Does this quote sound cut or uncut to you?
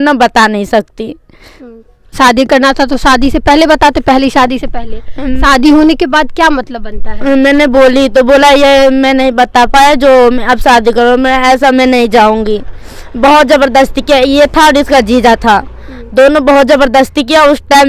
cut